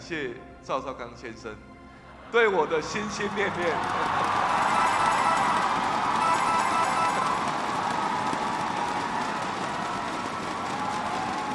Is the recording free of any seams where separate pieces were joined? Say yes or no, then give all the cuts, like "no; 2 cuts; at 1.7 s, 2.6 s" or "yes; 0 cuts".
yes; 0 cuts